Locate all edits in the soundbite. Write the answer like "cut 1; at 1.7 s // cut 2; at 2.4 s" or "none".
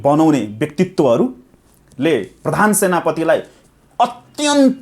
none